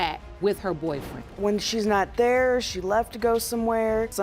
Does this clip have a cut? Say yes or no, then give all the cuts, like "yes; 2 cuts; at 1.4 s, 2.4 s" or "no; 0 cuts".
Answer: yes; 1 cut; at 1.1 s